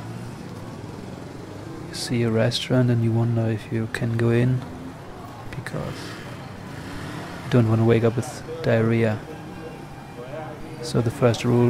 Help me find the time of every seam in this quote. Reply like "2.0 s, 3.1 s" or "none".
9.3 s